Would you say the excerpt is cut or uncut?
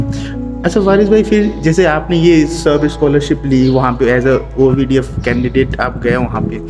uncut